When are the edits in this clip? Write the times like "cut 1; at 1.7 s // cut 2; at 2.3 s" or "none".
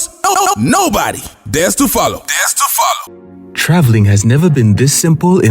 cut 1; at 3.1 s